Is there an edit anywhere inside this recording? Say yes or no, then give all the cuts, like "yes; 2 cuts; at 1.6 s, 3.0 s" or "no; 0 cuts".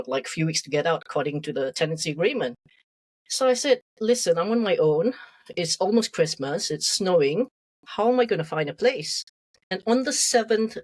yes; 1 cut; at 9.7 s